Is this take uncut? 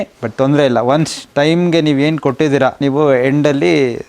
no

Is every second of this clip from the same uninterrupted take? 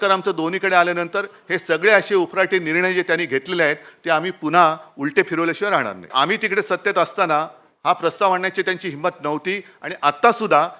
no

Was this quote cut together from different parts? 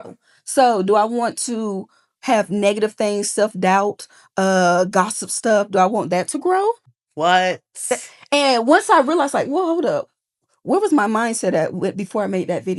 yes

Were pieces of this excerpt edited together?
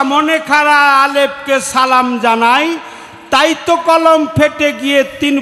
no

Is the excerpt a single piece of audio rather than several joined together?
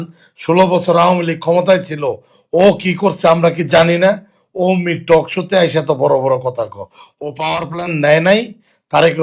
yes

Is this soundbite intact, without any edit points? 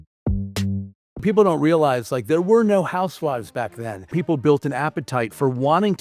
no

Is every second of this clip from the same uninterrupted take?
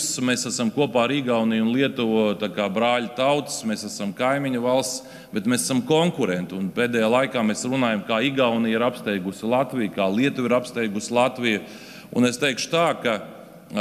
yes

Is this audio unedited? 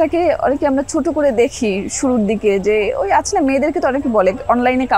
yes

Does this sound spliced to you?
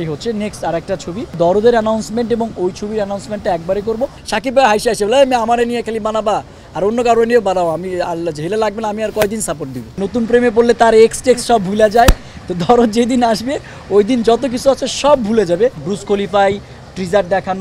yes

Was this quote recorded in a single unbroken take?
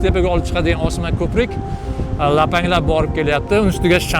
yes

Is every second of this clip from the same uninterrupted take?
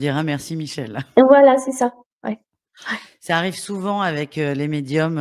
yes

